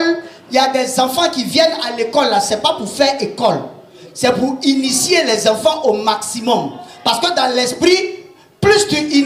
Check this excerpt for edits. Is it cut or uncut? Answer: uncut